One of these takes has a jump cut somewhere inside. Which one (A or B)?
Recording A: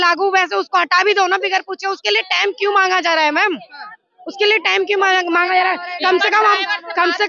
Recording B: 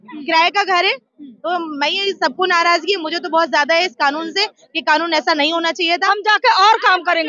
B